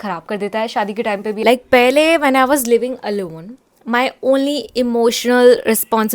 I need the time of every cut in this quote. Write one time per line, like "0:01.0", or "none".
0:01.4